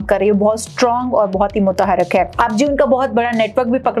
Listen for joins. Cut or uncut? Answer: cut